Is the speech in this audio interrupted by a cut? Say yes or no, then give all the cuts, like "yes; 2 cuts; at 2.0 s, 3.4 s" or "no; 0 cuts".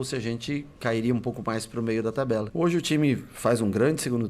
yes; 1 cut; at 2.5 s